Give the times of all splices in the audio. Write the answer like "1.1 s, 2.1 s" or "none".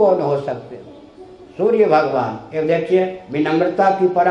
none